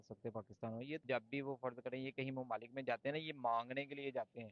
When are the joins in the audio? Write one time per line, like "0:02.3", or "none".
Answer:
0:01.0